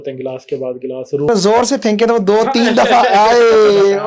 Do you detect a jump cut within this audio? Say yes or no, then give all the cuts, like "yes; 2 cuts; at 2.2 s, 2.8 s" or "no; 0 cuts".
yes; 1 cut; at 1.3 s